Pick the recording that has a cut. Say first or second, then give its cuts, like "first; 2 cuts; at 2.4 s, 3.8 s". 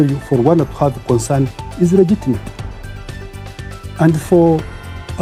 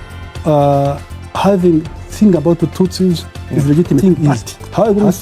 second; 1 cut; at 4.0 s